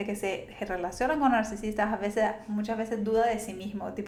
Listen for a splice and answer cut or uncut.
uncut